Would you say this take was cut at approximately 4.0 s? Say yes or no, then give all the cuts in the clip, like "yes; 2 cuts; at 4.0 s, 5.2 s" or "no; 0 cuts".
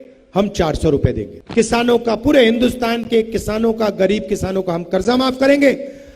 no; 1 cut; at 1.3 s